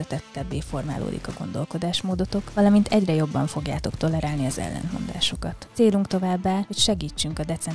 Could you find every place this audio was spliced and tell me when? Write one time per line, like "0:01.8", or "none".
none